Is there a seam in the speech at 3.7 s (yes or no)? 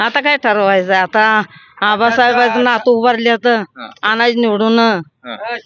no